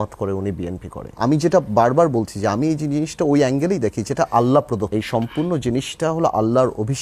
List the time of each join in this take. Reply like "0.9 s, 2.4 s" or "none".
1.1 s, 4.9 s